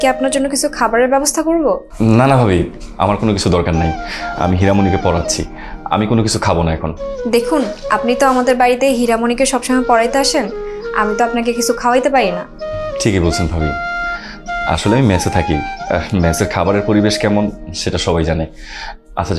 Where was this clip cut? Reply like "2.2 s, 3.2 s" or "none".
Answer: none